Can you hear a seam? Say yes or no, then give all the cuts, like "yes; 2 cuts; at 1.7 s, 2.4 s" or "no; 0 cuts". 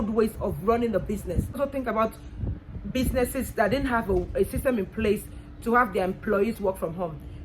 yes; 1 cut; at 1.5 s